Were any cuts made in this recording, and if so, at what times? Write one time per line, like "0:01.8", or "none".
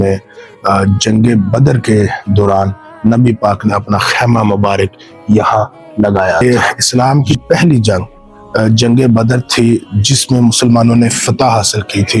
0:06.4